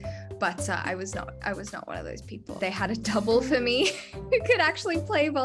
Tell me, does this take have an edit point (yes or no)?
yes